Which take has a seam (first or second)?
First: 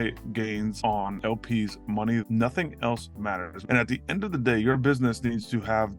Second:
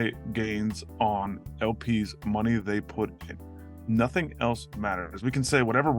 first